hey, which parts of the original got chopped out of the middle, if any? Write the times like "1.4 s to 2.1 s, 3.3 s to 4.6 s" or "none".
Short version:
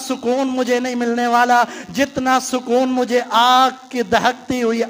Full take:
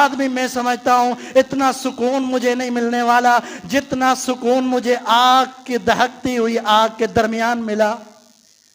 none